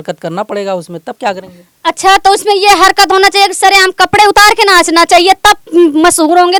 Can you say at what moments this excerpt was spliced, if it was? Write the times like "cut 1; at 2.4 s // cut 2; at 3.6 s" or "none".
none